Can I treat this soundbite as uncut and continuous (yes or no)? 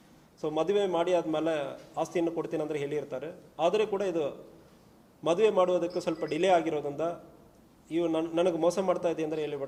yes